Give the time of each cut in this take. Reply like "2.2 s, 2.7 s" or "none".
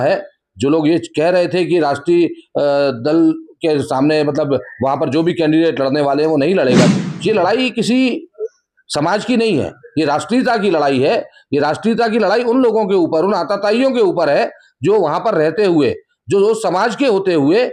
6.9 s